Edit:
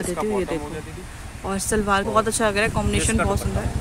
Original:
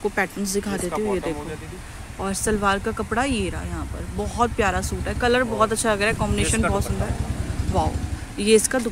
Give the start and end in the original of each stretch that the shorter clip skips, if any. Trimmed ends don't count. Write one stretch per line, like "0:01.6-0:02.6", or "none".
0:02.8-0:05.5